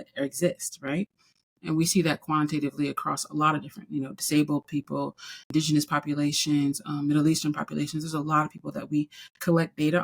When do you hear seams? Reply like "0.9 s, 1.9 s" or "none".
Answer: 1.6 s, 5.5 s